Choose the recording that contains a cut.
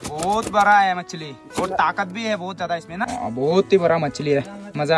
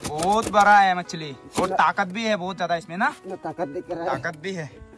first; 1 cut; at 3.1 s

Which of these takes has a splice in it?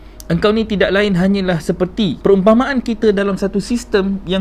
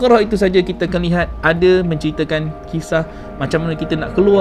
first; 1 cut; at 2.2 s

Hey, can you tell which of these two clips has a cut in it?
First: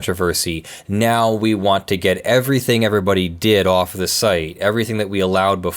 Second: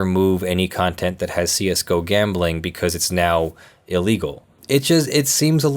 second; 1 cut; at 4.6 s

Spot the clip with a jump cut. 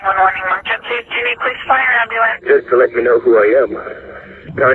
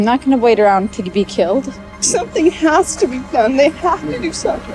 second; 1 cut; at 1.9 s

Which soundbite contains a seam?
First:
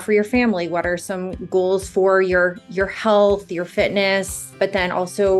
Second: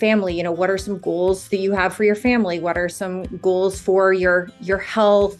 first; 1 cut; at 4.5 s

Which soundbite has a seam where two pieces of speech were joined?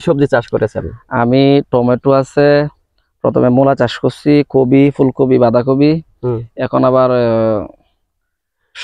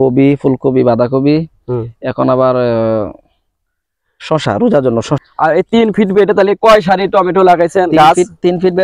second; 1 cut; at 5.2 s

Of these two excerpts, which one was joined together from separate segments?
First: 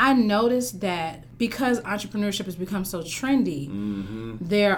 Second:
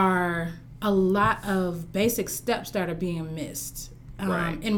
first; 1 cut; at 1.2 s

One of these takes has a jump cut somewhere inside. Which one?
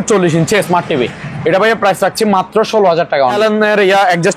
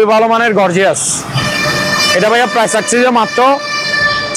first; 1 cut; at 3.3 s

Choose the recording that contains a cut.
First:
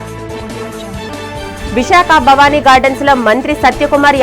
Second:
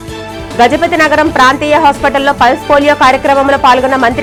first; 1 cut; at 1.1 s

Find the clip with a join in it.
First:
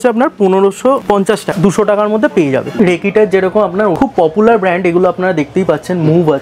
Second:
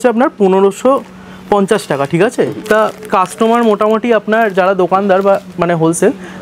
first; 3 cuts; at 1.5 s, 2.7 s, 3.9 s

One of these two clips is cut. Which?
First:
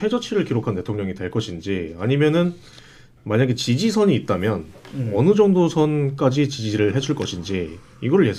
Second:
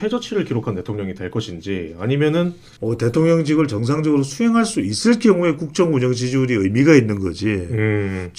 second; 1 cut; at 2.7 s

